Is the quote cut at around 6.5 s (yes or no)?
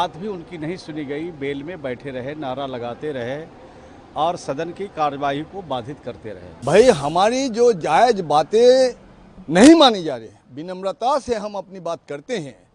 yes